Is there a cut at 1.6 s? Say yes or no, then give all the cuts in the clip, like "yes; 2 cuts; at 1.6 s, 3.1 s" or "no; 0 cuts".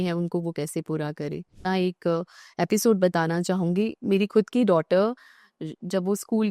yes; 1 cut; at 1.6 s